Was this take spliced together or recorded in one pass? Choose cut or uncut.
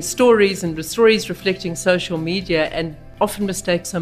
cut